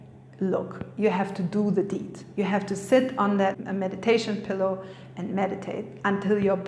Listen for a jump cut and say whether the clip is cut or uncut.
cut